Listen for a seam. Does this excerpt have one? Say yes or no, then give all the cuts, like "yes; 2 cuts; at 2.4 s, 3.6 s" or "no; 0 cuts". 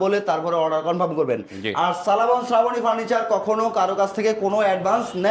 no; 0 cuts